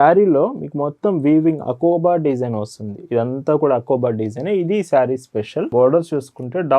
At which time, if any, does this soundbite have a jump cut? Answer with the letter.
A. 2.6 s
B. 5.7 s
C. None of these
B